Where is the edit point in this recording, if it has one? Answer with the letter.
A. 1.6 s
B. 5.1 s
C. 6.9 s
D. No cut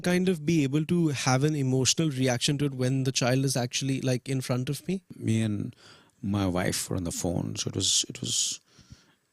B